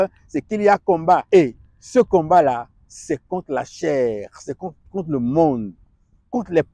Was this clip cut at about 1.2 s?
yes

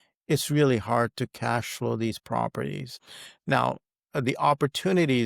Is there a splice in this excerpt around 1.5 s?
no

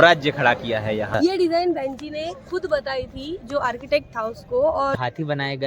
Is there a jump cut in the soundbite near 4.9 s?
yes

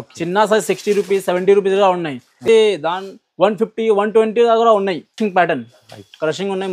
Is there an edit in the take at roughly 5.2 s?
yes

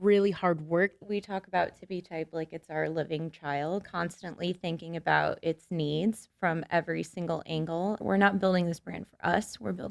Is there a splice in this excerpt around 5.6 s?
no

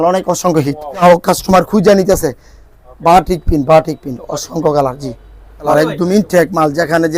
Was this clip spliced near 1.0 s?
yes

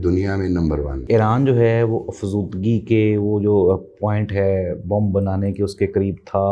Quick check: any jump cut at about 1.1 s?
yes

